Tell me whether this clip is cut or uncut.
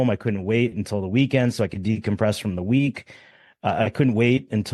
uncut